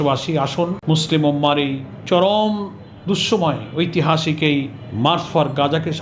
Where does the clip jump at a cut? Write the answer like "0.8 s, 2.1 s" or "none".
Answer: 0.8 s, 1.9 s, 4.8 s